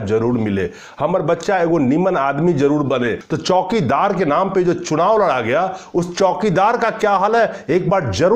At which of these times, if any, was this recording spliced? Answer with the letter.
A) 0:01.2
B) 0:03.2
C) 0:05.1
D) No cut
B